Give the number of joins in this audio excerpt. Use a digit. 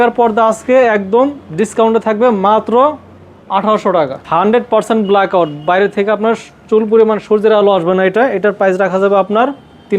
1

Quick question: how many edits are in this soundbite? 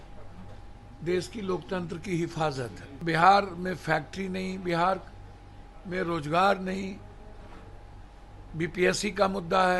1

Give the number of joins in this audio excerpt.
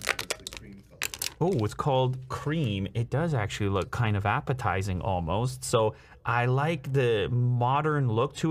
0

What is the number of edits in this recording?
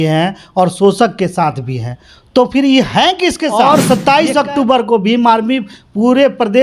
1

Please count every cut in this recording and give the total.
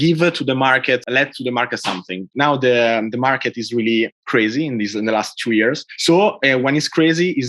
2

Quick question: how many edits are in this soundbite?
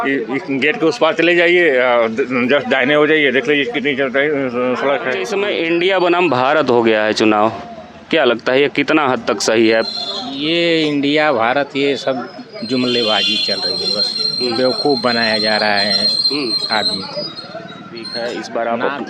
2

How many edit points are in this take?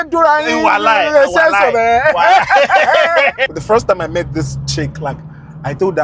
1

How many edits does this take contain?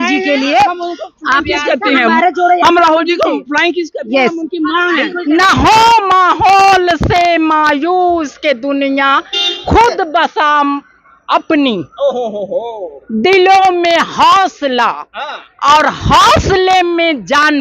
1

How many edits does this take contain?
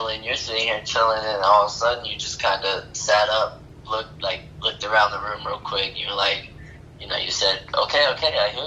0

